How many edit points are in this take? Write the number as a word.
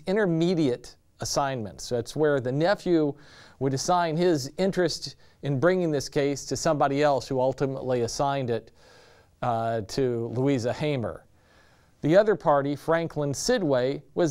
one